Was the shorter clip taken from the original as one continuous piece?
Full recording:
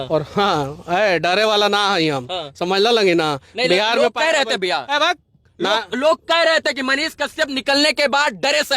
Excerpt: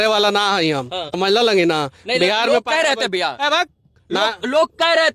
no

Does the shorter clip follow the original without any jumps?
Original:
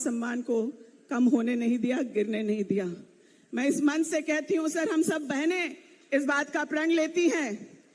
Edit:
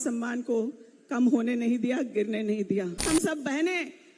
no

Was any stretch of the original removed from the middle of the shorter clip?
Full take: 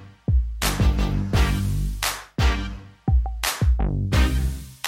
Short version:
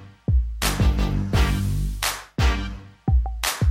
no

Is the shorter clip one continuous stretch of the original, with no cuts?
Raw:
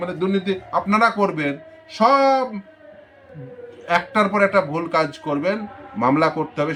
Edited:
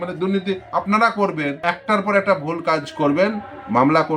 no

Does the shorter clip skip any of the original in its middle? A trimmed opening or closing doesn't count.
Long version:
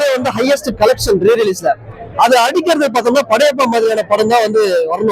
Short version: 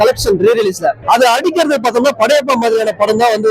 yes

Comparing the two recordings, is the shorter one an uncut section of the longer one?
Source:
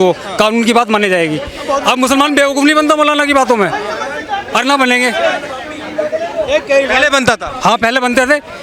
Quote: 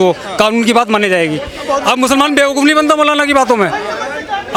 yes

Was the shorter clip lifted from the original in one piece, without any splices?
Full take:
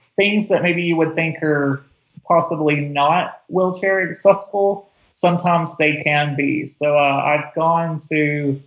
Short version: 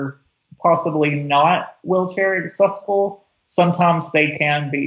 yes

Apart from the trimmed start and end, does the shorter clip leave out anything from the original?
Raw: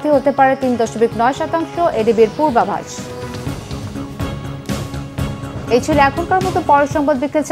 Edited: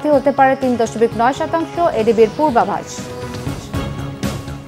yes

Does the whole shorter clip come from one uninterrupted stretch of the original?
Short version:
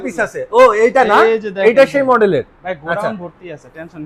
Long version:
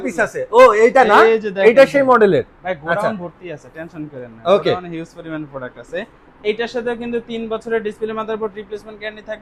yes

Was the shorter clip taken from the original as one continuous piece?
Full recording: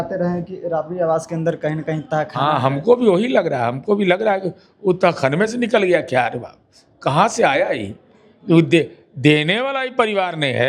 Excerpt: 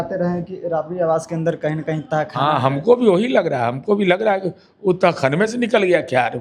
yes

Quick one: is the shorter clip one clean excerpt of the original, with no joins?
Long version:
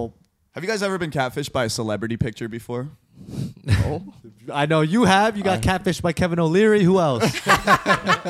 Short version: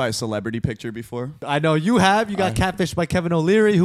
no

